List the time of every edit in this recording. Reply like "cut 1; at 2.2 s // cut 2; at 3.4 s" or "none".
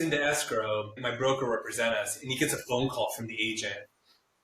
cut 1; at 0.9 s